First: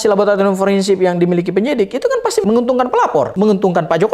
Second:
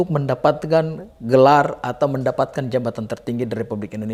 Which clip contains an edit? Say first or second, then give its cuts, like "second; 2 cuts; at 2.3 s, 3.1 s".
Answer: first; 2 cuts; at 2.4 s, 3.3 s